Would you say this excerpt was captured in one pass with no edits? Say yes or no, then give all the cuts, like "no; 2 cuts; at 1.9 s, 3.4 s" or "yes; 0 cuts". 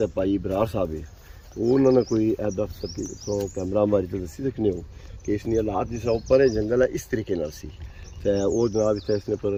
yes; 0 cuts